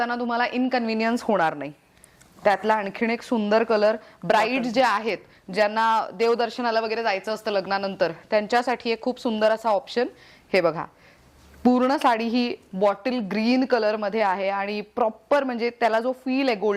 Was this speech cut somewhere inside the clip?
no; 0 cuts

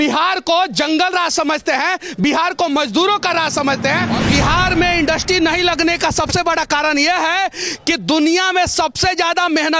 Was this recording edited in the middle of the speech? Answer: yes; 1 cut; at 4.2 s

